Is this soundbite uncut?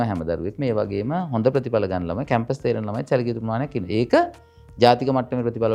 yes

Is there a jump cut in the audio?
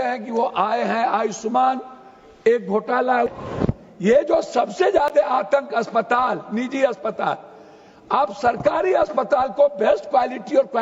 yes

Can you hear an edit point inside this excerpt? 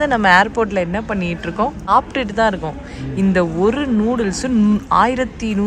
yes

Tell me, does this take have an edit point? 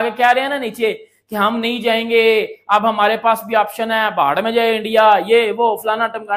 no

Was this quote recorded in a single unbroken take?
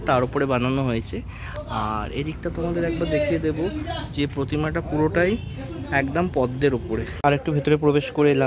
no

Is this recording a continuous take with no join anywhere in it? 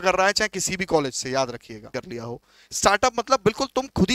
no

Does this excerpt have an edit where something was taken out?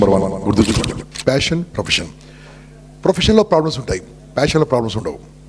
no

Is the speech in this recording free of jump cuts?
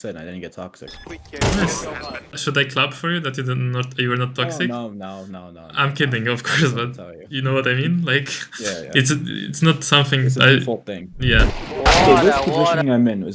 no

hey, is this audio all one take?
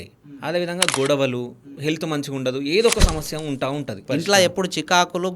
no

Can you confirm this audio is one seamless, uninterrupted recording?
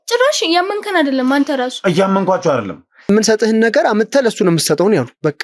no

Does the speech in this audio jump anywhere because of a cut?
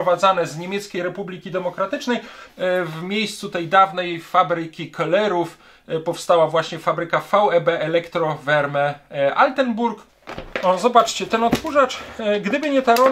yes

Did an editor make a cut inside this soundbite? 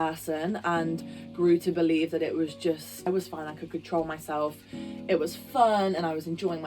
yes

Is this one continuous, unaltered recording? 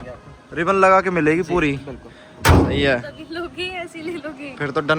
yes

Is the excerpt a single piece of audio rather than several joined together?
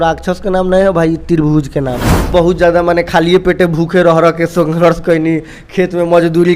no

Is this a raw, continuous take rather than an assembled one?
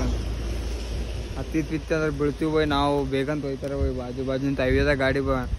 yes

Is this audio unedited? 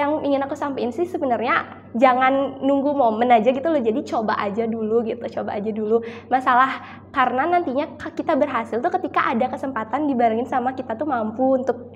yes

